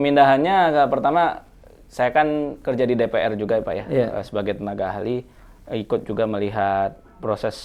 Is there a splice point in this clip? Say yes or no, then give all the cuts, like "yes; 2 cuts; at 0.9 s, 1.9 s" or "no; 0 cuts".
no; 0 cuts